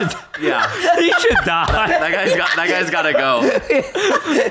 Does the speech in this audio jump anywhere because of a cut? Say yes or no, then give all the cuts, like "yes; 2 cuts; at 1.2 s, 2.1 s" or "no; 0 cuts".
no; 0 cuts